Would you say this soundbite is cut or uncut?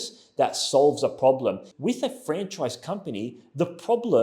cut